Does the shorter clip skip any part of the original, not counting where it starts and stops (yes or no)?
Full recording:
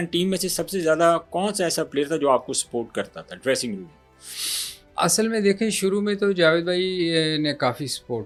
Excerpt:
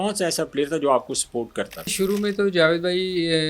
yes